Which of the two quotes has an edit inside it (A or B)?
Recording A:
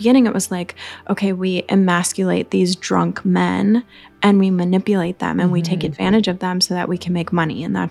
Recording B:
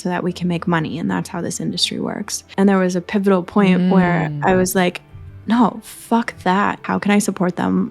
B